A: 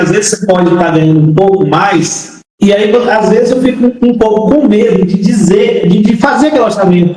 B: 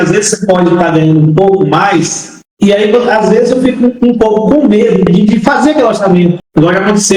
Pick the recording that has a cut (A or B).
B